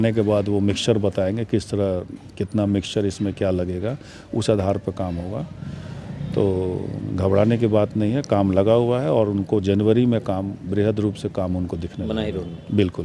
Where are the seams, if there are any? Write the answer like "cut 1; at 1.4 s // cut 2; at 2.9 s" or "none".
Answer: none

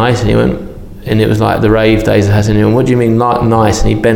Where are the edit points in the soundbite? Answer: none

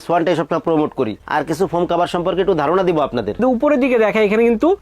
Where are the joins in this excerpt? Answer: cut 1; at 1.2 s // cut 2; at 3.4 s

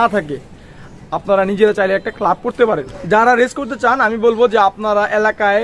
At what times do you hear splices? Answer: cut 1; at 2.9 s

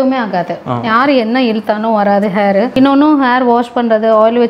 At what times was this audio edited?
cut 1; at 2.7 s

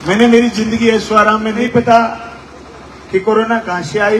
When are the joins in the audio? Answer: cut 1; at 1.6 s

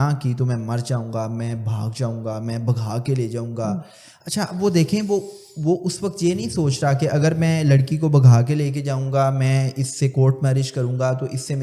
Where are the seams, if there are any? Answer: none

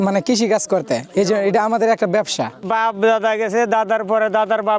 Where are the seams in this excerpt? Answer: cut 1; at 2.6 s

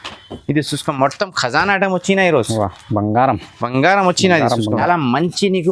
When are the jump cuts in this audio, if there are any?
cut 1; at 4.8 s

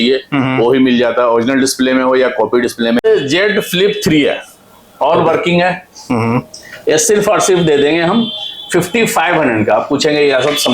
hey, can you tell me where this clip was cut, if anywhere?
cut 1; at 3.0 s

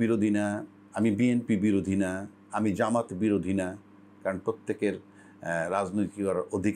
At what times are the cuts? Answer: none

